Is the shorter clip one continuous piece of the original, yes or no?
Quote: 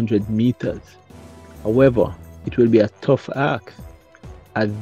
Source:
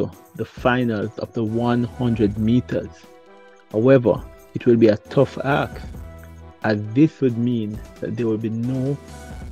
yes